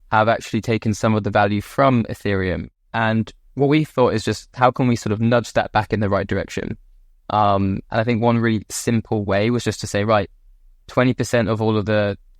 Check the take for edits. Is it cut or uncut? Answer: cut